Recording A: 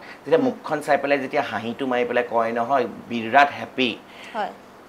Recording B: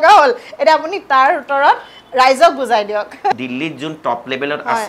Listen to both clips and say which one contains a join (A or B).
B